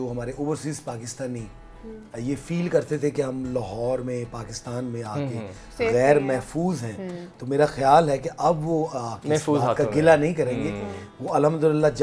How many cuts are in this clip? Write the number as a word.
zero